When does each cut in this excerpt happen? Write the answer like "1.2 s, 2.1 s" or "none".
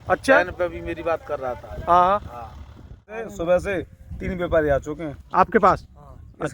3.1 s